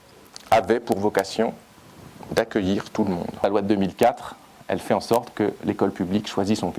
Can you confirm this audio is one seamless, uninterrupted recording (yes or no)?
no